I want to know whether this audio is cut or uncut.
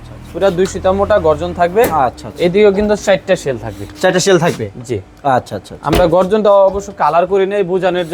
uncut